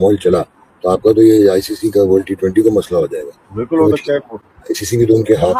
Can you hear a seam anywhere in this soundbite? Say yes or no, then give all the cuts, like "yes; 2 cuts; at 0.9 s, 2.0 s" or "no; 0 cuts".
no; 0 cuts